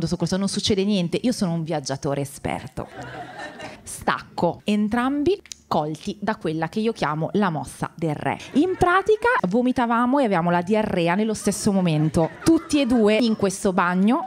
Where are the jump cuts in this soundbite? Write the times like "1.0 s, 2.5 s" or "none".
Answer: 4.6 s, 8.4 s, 9.4 s, 13.2 s